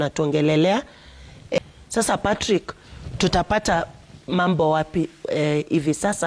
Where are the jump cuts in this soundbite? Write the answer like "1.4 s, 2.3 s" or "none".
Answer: 1.6 s

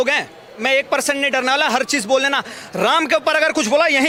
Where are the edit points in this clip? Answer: none

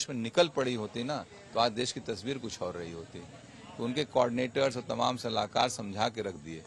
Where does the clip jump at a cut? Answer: none

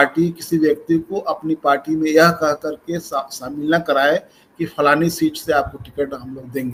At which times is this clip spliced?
none

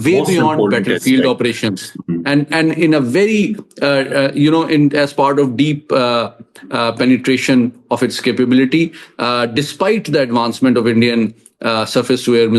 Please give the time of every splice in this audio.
none

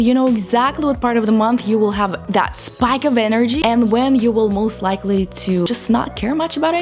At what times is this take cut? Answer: 3.6 s, 5.7 s

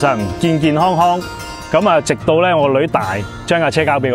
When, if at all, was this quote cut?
none

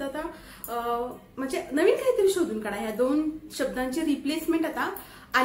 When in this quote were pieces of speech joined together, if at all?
none

